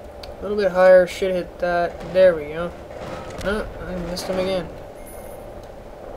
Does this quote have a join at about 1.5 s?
yes; 1 cut; at 1.5 s

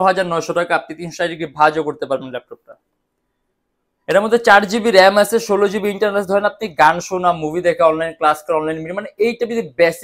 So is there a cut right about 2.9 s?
no; 0 cuts

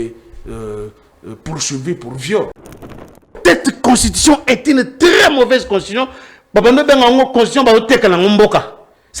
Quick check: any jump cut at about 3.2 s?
yes; 1 cut; at 3.2 s

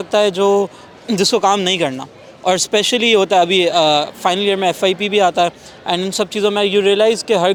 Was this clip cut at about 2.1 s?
no; 0 cuts

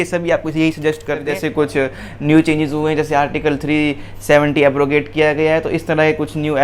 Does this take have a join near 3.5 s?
no; 1 cut; at 1.3 s

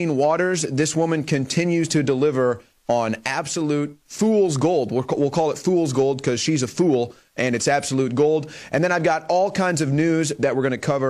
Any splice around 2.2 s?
yes; 1 cut; at 2.2 s

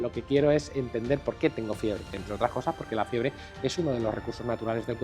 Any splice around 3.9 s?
no; 1 cut; at 2.2 s

